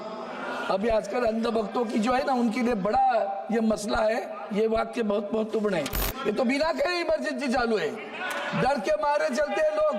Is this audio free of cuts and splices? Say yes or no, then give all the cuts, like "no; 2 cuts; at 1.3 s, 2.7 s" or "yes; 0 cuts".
no; 1 cut; at 6.0 s